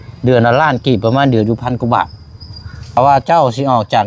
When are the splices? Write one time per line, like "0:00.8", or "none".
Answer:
0:03.0